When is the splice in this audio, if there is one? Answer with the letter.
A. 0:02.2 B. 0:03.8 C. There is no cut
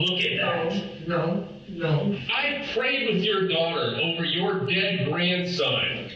A